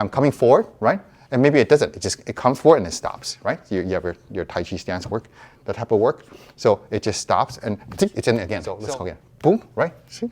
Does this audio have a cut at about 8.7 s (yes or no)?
yes